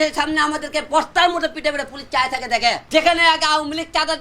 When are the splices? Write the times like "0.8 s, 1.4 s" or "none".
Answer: 2.8 s

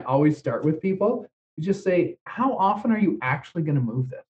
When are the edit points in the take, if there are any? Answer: 1.3 s

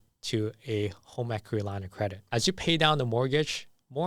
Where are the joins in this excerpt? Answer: 2.2 s

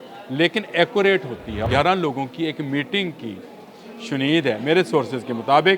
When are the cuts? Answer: 1.7 s

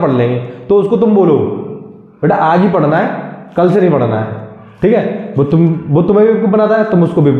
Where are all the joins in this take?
none

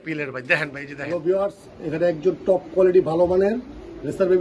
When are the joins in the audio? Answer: 1.0 s

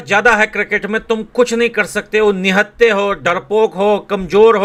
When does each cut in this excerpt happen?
none

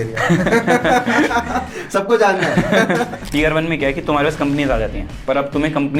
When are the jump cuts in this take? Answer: 3.2 s

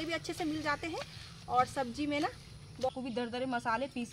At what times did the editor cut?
2.9 s

